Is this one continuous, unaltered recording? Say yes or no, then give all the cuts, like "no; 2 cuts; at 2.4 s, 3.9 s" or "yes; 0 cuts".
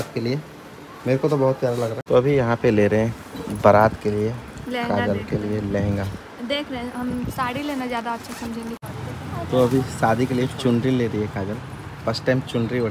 no; 2 cuts; at 2.0 s, 8.8 s